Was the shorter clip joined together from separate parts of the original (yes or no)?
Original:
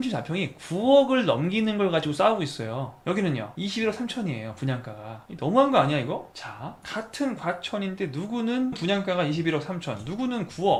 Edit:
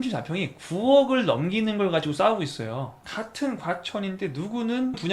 yes